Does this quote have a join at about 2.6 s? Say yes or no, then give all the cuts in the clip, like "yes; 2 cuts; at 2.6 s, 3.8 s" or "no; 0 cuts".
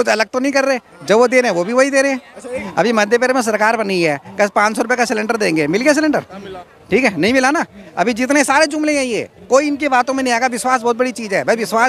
yes; 1 cut; at 2.6 s